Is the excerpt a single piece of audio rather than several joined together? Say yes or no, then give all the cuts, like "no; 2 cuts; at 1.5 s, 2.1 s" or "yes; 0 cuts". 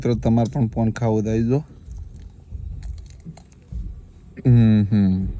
yes; 0 cuts